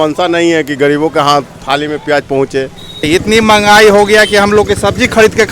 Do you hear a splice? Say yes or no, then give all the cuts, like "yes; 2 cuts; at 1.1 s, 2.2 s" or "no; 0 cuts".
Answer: yes; 1 cut; at 3.1 s